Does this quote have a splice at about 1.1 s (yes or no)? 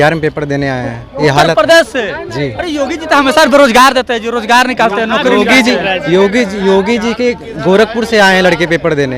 no